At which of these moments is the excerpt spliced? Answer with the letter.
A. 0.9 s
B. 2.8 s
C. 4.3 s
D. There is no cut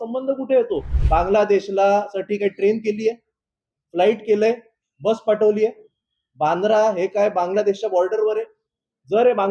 A